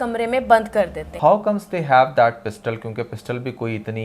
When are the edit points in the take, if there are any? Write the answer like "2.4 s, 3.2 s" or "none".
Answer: 1.0 s